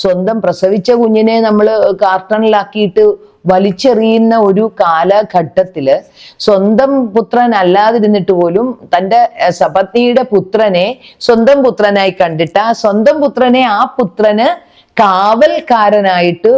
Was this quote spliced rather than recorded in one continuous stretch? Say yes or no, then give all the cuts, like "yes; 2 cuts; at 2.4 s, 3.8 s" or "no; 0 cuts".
no; 0 cuts